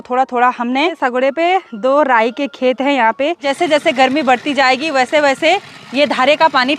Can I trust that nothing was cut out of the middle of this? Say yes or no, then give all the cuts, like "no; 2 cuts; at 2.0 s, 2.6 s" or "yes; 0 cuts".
no; 2 cuts; at 1.0 s, 3.5 s